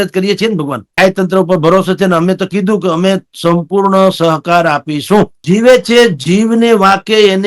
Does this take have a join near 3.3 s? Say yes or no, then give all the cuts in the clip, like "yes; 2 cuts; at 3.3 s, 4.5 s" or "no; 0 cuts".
no; 2 cuts; at 1.0 s, 5.4 s